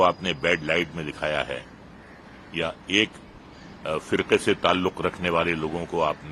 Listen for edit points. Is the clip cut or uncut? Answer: uncut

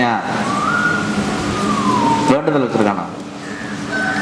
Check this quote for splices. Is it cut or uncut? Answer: uncut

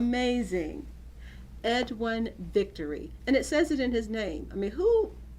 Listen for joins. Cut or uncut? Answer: cut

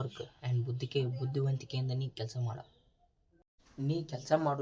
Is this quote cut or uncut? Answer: cut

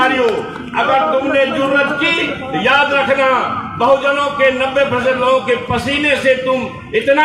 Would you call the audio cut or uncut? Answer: uncut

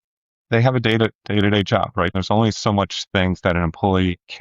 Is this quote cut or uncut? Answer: cut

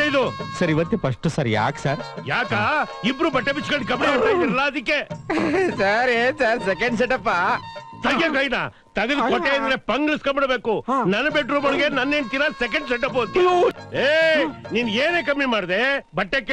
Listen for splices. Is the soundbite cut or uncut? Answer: cut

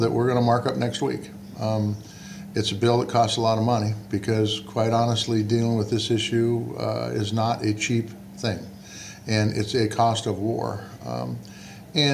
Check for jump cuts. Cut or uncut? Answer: uncut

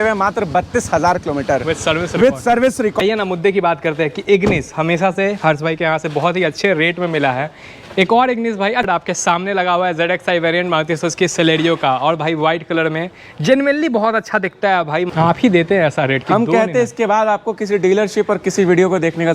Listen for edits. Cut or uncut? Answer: cut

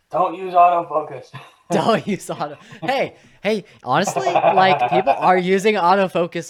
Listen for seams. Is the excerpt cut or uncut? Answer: uncut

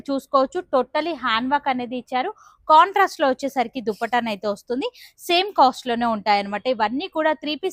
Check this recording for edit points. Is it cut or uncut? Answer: uncut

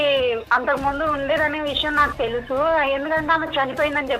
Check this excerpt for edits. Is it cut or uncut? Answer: uncut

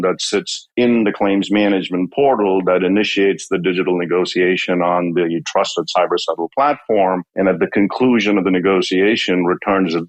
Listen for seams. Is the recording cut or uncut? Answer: uncut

